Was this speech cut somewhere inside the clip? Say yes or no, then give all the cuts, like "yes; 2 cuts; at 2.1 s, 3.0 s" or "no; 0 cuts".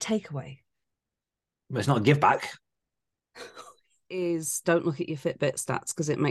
yes; 1 cut; at 4.0 s